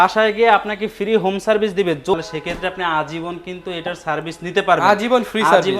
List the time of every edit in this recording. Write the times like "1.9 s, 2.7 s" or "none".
2.1 s